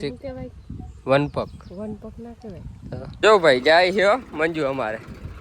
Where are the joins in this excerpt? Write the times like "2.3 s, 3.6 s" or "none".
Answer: 3.2 s